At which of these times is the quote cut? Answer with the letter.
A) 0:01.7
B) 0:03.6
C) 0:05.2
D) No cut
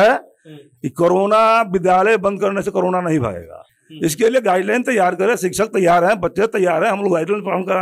D